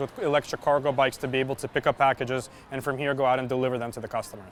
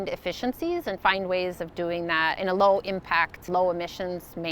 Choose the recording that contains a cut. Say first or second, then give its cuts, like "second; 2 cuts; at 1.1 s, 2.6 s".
second; 2 cuts; at 2.4 s, 3.4 s